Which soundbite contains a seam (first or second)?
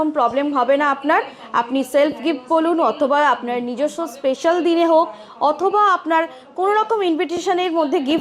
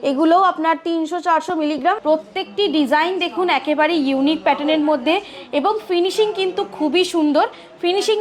second